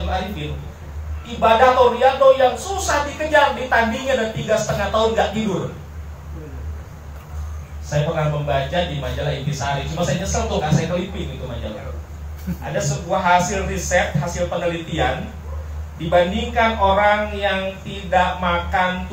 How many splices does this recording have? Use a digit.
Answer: 1